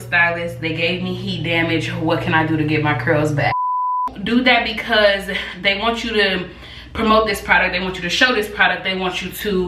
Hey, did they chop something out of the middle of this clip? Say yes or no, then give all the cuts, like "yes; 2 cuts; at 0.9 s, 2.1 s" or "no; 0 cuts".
yes; 1 cut; at 4.1 s